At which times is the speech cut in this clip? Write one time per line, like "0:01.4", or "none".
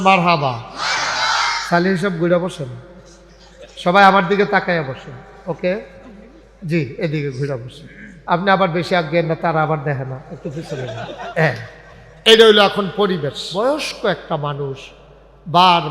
0:13.4